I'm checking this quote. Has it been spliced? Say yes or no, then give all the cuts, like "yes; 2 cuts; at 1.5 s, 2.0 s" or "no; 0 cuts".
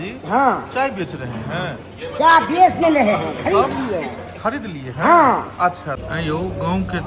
yes; 1 cut; at 5.9 s